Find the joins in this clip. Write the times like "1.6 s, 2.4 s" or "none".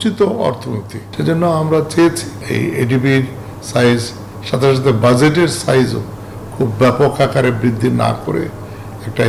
1.1 s, 2.3 s

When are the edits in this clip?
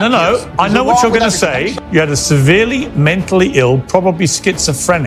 1.7 s

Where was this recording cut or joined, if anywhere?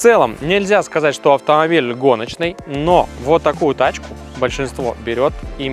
none

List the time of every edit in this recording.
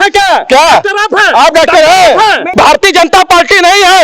2.5 s

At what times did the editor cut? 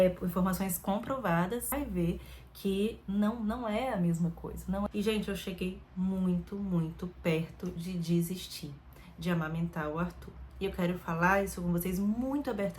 1.7 s, 4.9 s

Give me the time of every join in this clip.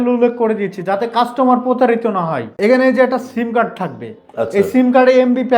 2.5 s

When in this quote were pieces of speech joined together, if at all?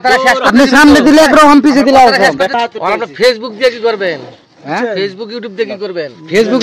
2.5 s

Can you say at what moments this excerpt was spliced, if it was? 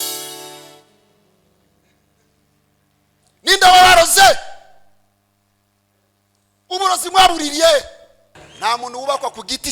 8.4 s

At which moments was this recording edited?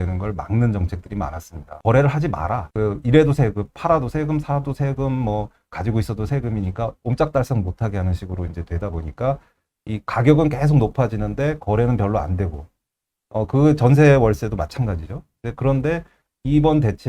1.7 s, 2.6 s

